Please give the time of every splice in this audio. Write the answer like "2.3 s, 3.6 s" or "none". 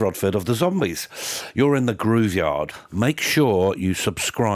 2.8 s